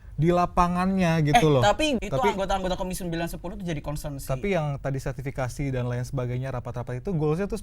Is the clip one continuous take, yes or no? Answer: no